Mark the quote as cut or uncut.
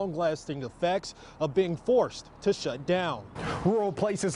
cut